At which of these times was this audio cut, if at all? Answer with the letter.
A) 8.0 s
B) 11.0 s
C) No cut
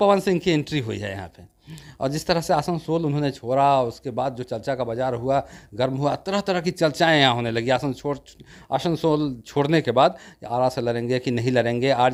C